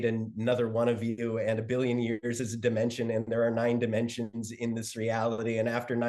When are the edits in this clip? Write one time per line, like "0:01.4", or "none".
none